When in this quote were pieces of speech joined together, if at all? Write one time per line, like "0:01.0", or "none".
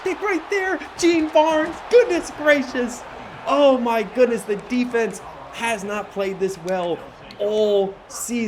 none